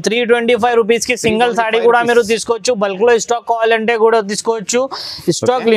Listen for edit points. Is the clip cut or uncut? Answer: uncut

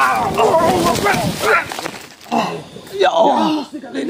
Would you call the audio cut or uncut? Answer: cut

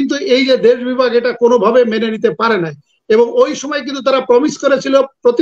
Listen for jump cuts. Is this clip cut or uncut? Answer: uncut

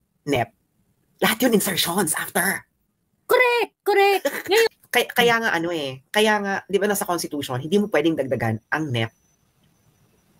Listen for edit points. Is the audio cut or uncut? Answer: cut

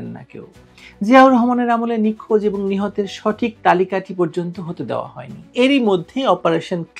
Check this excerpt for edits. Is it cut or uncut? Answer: cut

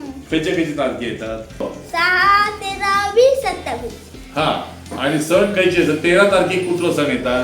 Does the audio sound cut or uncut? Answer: cut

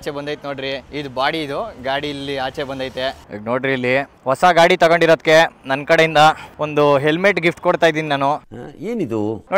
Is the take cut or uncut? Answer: uncut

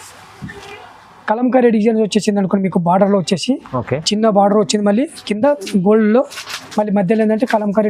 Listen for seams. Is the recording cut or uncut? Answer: uncut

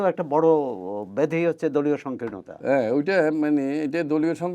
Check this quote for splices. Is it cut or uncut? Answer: uncut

